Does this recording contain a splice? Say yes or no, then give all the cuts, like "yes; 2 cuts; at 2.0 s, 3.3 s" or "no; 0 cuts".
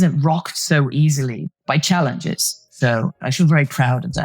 yes; 2 cuts; at 1.4 s, 3.1 s